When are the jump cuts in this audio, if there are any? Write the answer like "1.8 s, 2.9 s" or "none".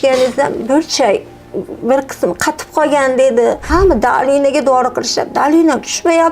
3.6 s